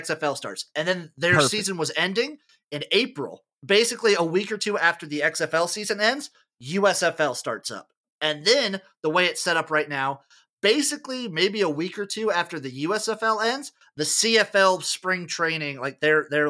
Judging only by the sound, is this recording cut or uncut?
uncut